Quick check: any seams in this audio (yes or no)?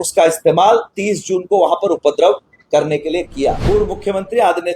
yes